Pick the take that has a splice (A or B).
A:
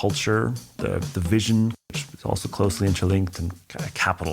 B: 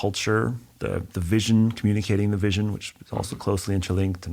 A